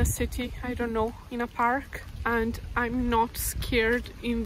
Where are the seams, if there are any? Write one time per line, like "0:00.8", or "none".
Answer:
0:01.2
0:02.0